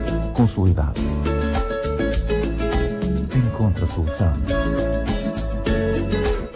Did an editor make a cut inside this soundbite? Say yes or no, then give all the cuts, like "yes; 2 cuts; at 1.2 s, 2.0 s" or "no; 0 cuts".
no; 0 cuts